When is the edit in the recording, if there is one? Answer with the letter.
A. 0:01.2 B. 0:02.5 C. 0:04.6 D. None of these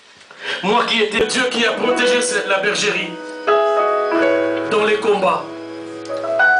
A